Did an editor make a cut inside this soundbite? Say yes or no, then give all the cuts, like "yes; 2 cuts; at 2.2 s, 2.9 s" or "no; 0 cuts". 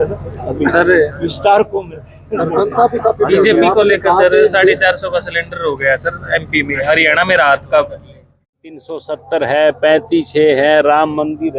yes; 1 cut; at 8.8 s